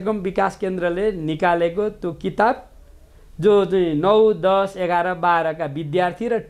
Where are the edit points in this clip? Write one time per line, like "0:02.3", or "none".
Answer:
none